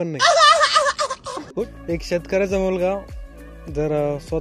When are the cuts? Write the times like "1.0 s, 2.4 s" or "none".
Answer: 1.7 s